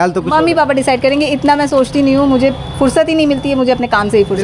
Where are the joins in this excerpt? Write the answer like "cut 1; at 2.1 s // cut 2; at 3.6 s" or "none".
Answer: none